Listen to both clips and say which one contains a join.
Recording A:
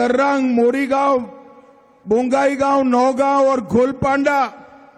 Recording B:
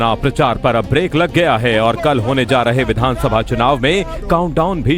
A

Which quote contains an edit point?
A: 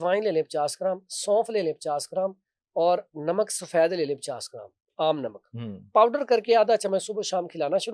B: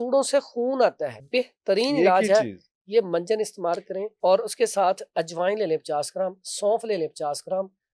B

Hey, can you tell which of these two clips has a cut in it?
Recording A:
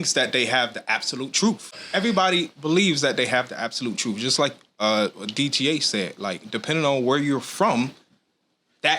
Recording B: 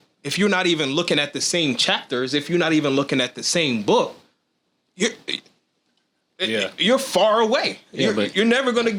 A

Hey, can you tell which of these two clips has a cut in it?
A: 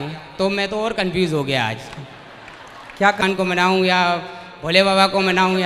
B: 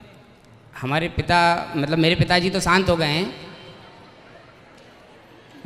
A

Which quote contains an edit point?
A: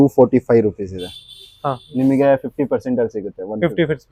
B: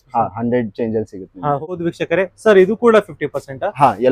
B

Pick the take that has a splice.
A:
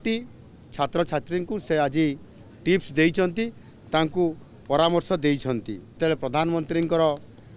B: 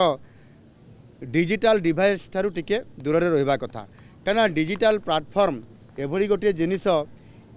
A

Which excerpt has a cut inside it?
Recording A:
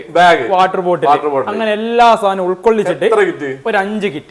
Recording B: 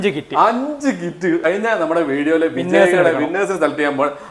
B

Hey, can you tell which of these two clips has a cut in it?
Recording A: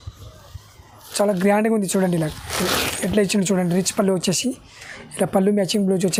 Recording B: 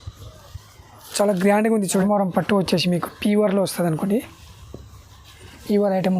B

